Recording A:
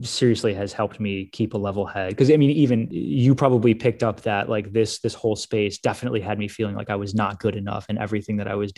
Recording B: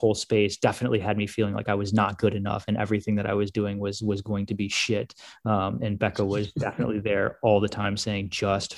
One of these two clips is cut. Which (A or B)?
A